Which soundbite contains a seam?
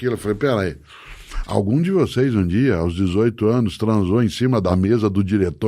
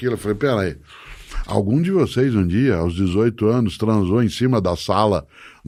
first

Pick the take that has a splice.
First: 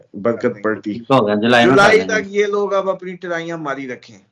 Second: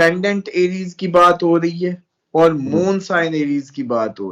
first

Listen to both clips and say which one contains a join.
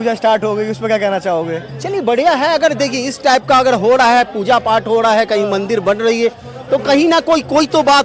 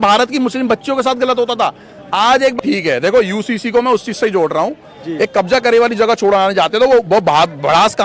second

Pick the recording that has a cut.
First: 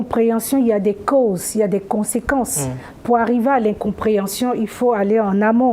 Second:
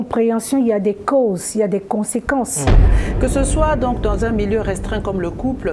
second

